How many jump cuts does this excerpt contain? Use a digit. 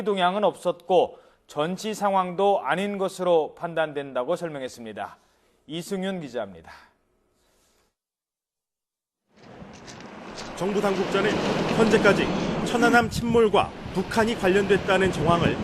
1